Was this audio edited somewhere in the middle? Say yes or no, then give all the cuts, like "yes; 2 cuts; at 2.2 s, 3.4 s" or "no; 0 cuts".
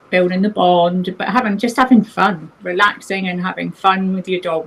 no; 0 cuts